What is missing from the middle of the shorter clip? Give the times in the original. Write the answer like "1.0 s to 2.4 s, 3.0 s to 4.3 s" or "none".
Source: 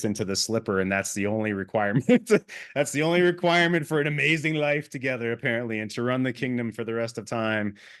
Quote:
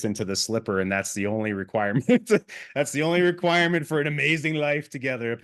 none